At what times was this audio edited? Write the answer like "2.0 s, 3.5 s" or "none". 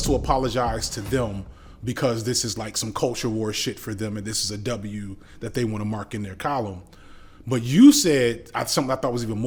none